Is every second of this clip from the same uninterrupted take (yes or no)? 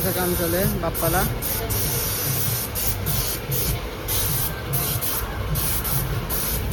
yes